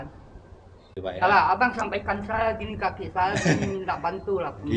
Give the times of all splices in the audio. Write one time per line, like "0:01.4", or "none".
0:00.9